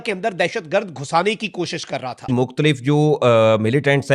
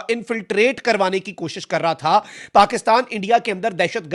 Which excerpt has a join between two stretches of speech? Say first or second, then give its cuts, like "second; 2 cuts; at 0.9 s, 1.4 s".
first; 1 cut; at 2.3 s